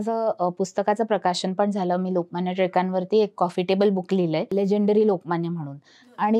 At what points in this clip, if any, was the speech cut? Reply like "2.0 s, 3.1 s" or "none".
none